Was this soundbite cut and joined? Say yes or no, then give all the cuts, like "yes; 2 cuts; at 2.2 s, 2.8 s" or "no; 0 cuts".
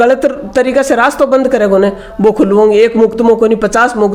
no; 0 cuts